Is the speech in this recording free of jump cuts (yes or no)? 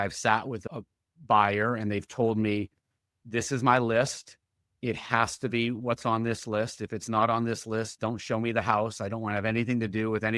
yes